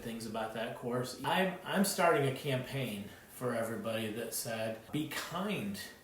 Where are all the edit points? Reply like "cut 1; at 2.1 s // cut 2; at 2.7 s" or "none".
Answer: cut 1; at 1.1 s // cut 2; at 4.9 s